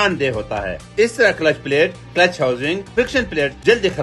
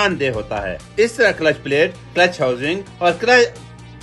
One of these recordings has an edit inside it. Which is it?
first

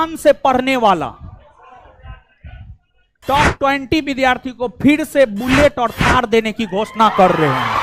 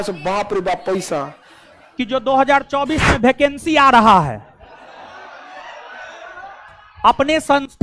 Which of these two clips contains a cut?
second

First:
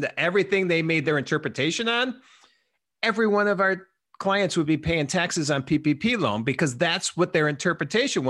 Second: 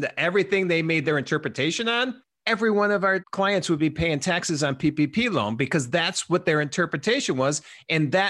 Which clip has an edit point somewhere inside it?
second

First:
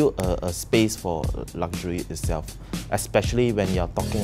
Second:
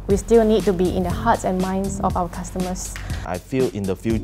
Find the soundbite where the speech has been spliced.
second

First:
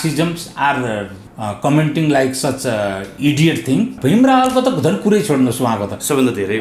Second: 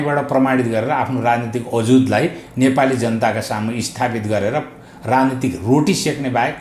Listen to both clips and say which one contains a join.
first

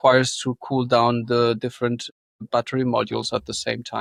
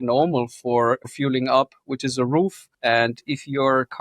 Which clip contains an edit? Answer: second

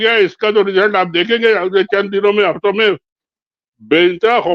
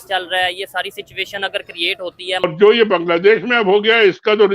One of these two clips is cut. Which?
second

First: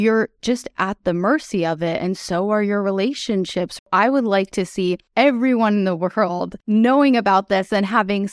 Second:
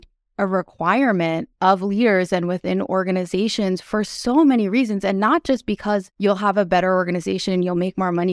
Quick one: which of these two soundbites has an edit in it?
first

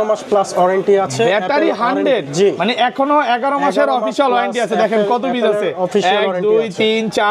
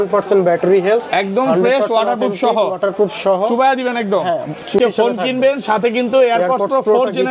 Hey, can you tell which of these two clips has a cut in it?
second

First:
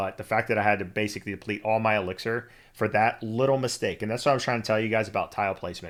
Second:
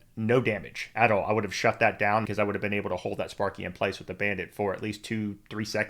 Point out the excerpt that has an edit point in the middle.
second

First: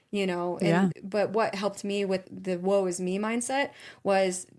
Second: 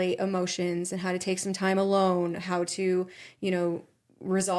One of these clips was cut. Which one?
first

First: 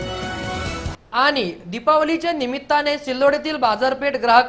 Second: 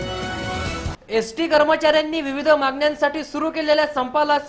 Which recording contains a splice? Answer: first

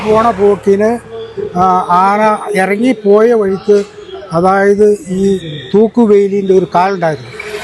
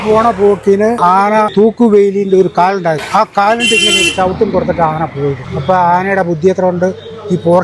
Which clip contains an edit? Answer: second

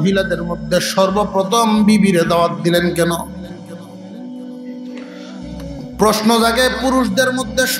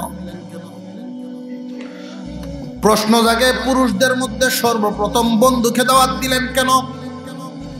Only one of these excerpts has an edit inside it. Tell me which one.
second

